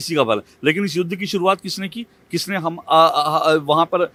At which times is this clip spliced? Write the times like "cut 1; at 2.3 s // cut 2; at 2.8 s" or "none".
none